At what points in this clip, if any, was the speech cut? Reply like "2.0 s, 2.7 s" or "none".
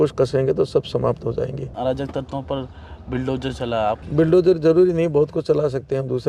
1.7 s, 4.0 s